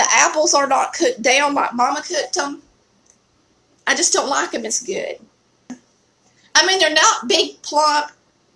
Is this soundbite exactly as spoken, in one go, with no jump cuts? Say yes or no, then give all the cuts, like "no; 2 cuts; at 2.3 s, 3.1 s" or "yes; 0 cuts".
no; 1 cut; at 5.7 s